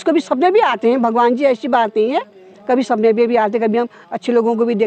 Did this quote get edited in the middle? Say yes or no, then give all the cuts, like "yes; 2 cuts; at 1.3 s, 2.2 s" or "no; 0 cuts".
no; 0 cuts